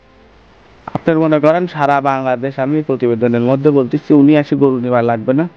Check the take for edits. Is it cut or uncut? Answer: uncut